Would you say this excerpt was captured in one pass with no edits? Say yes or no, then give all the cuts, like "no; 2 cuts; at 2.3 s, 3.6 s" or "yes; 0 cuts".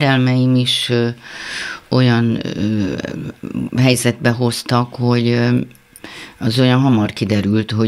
yes; 0 cuts